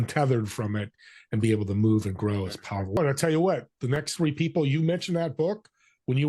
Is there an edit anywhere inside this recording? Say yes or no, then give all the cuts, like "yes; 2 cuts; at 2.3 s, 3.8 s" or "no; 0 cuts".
yes; 1 cut; at 3.0 s